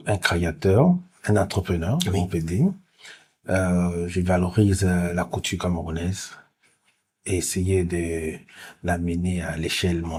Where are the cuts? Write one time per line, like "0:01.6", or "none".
none